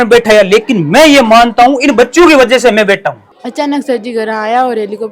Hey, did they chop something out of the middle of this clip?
yes; 1 cut; at 3.3 s

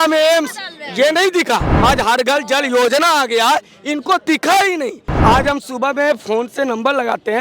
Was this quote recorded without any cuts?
no; 2 cuts; at 1.7 s, 5.1 s

